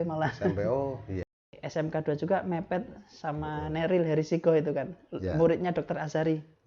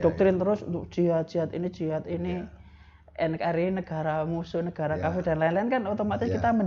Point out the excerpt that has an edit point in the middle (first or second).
first